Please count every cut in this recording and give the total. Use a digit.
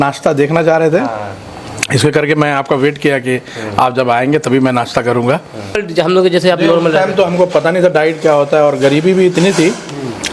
1